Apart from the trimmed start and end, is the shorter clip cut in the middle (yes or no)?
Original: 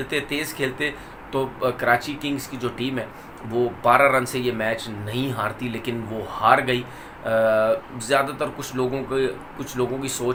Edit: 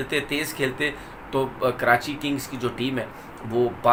no